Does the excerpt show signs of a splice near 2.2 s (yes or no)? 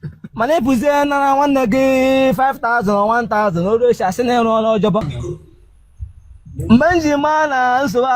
no